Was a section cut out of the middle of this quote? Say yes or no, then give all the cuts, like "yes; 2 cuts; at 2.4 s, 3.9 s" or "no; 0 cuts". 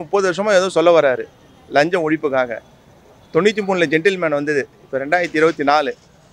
no; 0 cuts